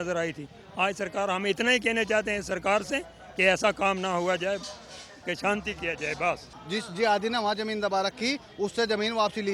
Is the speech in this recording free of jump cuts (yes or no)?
no